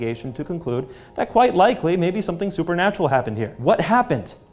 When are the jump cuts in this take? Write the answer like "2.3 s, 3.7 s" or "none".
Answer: 3.5 s